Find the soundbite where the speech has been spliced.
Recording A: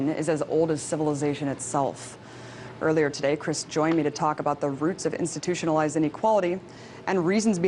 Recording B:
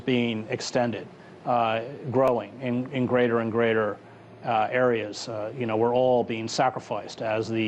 B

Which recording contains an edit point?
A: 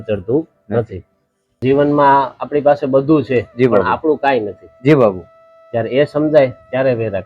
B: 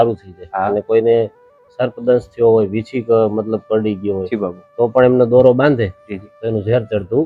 A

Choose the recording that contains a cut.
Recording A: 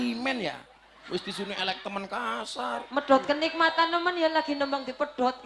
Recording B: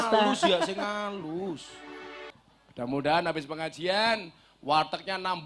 B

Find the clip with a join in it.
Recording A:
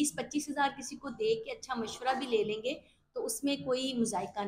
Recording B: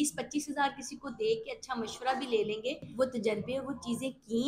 B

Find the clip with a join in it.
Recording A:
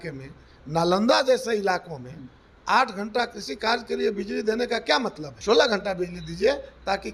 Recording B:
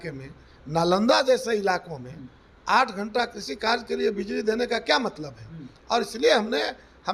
A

